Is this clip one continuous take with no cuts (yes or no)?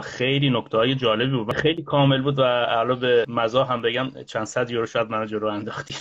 no